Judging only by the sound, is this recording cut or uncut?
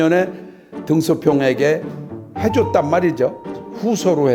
uncut